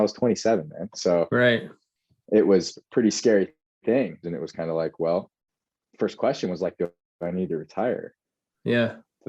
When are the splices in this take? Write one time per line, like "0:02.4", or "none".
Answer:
0:04.3